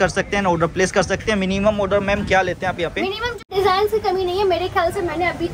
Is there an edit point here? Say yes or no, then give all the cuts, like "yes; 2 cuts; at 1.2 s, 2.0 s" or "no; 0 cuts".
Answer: yes; 1 cut; at 3.4 s